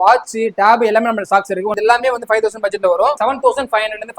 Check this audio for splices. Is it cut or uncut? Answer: cut